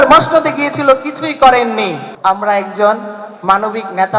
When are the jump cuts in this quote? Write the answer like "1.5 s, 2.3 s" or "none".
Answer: 2.0 s